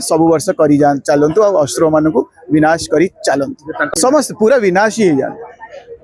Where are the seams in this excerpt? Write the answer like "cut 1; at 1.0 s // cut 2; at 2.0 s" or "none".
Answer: cut 1; at 3.9 s